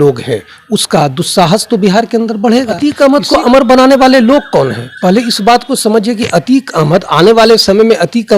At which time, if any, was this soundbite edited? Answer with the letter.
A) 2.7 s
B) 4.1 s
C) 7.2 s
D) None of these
A